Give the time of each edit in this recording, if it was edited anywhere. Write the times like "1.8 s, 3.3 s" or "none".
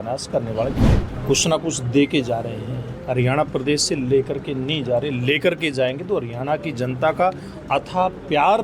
0.9 s